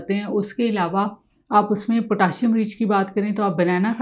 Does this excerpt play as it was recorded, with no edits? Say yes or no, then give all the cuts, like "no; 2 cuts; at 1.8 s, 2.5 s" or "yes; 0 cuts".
yes; 0 cuts